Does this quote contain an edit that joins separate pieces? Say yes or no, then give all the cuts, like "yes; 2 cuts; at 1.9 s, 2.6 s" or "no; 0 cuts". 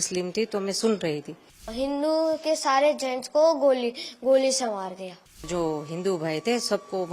yes; 2 cuts; at 1.7 s, 5.4 s